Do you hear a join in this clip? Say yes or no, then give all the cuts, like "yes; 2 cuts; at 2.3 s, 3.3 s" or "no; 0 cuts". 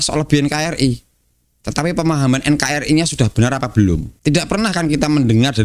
yes; 1 cut; at 4.1 s